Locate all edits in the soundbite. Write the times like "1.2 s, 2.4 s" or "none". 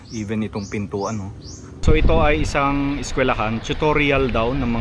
1.8 s